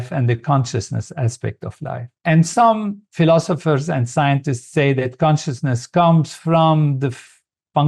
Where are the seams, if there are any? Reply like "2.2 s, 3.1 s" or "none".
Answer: none